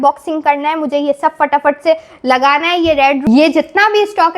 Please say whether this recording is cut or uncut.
uncut